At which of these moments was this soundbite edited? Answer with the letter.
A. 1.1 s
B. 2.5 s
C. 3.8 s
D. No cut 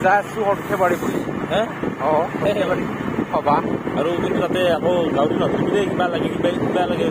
D